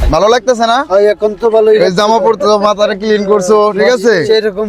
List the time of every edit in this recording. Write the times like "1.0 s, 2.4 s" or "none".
none